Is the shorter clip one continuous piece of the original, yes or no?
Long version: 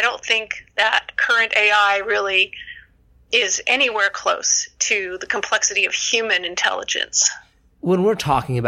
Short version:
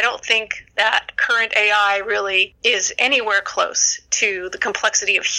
no